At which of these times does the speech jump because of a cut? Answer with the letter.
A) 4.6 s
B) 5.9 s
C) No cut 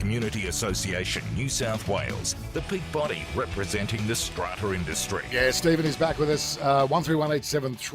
C